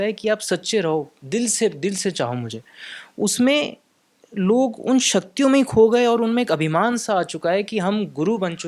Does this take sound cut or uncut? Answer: uncut